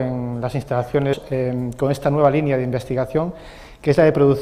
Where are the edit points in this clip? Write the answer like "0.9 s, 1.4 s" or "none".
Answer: none